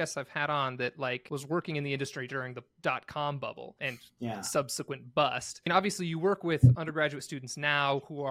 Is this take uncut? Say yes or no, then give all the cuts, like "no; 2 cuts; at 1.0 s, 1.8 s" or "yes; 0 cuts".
no; 3 cuts; at 1.2 s, 3.8 s, 5.7 s